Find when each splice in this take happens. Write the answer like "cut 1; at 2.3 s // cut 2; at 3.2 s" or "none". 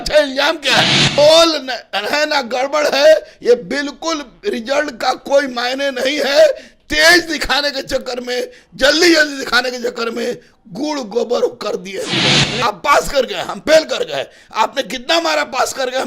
cut 1; at 1.2 s // cut 2; at 12.5 s